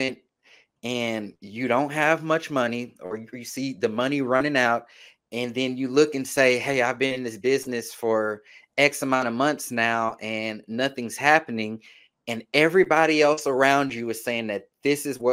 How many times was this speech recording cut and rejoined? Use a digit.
0